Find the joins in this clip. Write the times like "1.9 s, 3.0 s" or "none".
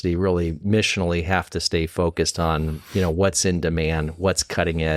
none